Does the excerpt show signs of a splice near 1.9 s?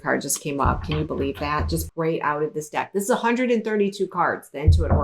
yes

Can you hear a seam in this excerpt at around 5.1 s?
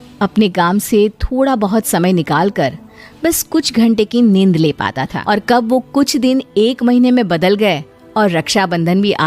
yes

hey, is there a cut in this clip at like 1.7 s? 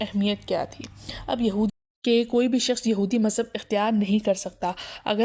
yes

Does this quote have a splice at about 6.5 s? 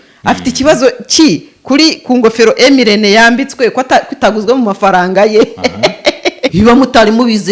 yes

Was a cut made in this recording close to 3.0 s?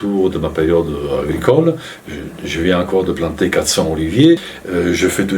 no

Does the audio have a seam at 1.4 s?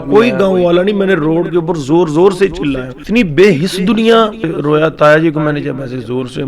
no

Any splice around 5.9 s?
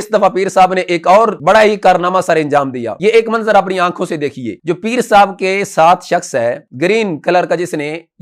no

